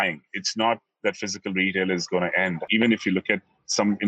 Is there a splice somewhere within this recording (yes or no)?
yes